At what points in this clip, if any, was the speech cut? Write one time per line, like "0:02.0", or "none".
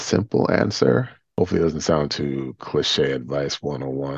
0:01.3